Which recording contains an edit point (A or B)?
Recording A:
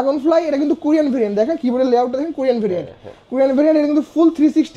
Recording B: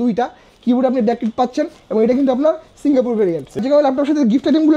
B